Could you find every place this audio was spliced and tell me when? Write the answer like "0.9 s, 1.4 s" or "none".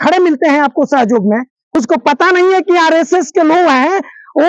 1.6 s